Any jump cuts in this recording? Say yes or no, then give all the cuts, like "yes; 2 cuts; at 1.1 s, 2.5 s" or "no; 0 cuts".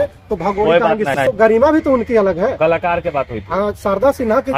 yes; 1 cut; at 1.2 s